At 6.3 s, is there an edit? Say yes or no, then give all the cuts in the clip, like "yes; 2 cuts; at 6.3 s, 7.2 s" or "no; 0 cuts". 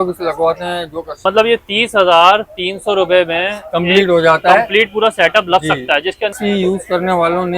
yes; 2 cuts; at 1.1 s, 6.3 s